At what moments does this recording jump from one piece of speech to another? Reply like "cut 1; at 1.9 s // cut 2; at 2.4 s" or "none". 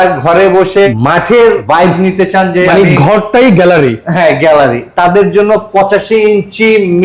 cut 1; at 0.9 s // cut 2; at 1.6 s